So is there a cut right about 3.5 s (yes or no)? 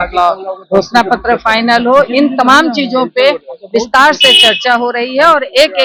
no